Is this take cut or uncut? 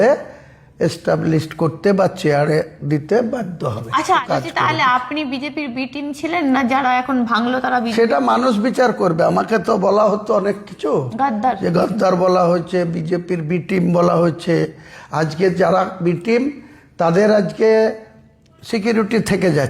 cut